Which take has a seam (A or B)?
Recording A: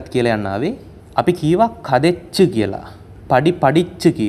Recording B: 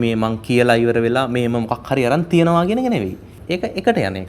B